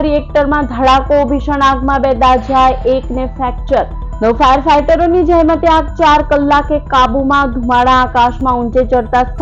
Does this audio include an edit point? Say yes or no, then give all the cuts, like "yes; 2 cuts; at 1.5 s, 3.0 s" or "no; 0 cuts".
no; 0 cuts